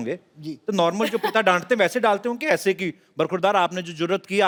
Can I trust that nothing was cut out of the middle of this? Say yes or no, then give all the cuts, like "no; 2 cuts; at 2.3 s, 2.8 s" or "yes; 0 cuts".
yes; 0 cuts